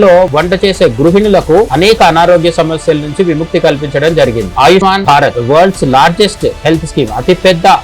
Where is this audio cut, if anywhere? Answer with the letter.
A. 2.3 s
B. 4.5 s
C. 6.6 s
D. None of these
B